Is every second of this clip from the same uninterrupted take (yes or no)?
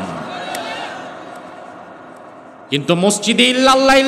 yes